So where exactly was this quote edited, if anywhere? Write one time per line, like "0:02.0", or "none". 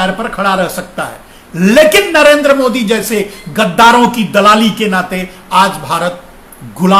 none